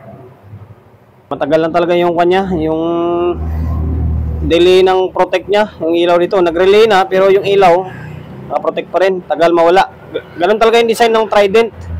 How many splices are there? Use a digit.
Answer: 1